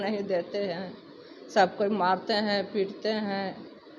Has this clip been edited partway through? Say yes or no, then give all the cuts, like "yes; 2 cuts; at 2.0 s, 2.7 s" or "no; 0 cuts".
no; 0 cuts